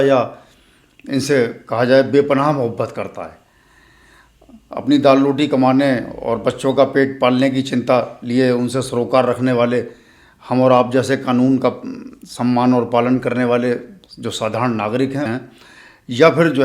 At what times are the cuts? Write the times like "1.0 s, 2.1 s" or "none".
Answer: 15.3 s